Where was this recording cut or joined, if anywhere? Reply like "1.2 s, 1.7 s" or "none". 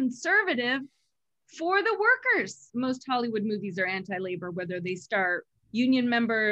2.6 s, 5.5 s